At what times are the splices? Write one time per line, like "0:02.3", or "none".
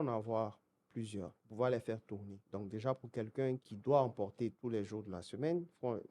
0:01.4
0:02.4
0:03.7
0:04.6